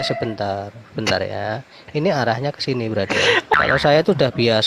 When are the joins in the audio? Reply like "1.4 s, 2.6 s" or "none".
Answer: 3.5 s